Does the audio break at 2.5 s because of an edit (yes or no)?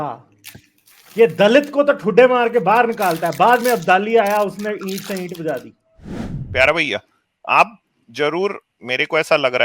no